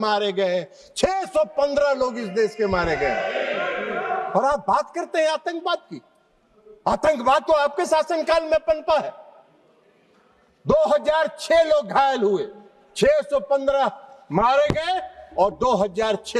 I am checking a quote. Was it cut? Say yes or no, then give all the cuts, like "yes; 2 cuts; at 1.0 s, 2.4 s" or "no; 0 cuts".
no; 0 cuts